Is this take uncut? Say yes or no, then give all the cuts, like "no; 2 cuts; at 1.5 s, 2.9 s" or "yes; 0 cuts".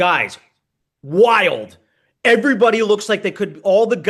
yes; 0 cuts